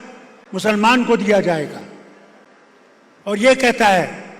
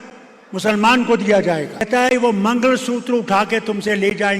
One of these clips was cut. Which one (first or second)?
second